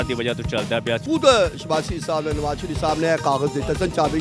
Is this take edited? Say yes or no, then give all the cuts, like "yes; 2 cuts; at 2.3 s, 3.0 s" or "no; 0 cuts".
yes; 1 cut; at 1.0 s